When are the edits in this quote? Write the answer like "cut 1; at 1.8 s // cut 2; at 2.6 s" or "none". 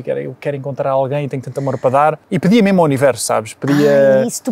cut 1; at 2.3 s